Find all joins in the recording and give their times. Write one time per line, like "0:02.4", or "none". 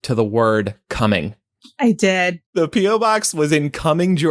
0:02.4